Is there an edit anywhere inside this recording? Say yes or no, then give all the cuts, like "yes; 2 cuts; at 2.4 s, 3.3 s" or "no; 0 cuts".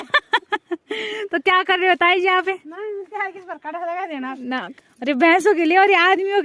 yes; 1 cut; at 4.7 s